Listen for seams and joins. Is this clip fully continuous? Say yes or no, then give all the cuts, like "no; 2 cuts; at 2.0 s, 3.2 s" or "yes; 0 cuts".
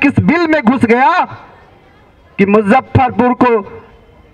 yes; 0 cuts